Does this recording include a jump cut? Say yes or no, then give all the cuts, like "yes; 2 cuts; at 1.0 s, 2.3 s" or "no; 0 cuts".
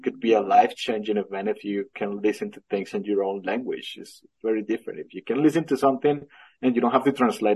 no; 0 cuts